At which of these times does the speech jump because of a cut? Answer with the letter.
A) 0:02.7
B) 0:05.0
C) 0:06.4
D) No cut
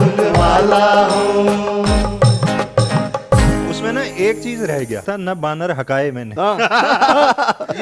B